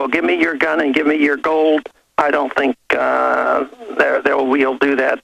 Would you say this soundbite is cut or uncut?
cut